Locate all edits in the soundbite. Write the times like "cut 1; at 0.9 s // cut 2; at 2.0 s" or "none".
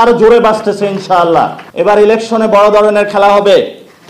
cut 1; at 1.6 s

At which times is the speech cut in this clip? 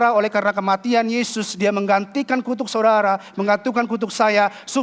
none

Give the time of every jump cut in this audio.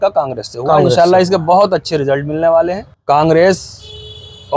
cut 1; at 2.9 s

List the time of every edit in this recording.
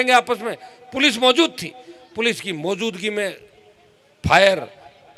none

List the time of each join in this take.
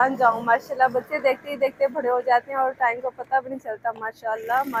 none

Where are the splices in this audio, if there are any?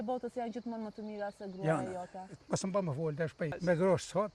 cut 1; at 2.3 s // cut 2; at 3.5 s

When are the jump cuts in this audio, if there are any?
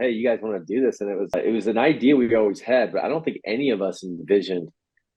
cut 1; at 1.3 s

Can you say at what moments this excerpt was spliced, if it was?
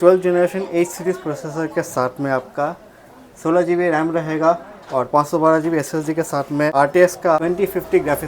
cut 1; at 6.7 s // cut 2; at 7.4 s

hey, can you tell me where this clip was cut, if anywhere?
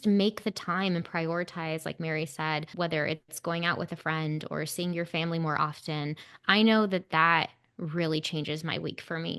cut 1; at 2.7 s

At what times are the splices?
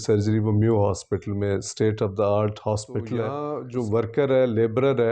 cut 1; at 3.5 s

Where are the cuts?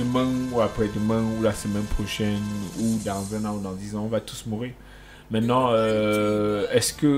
none

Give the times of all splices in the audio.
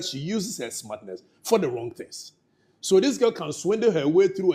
none

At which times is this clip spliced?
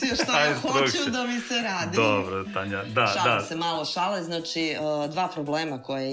none

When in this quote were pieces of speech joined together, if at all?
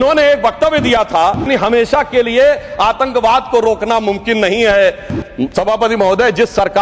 cut 1; at 1.5 s

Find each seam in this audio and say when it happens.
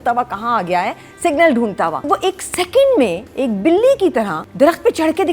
cut 1; at 2.0 s // cut 2; at 4.4 s

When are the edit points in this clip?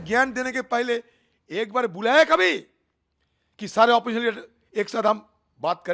none

